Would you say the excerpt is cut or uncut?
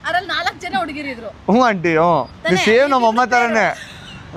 uncut